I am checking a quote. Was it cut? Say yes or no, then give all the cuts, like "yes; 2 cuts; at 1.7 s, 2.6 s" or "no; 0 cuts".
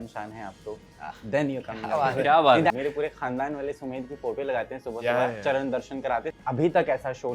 yes; 2 cuts; at 2.7 s, 6.3 s